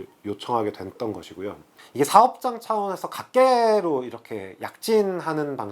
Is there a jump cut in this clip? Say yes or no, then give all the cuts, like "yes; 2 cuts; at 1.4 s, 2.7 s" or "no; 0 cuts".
no; 0 cuts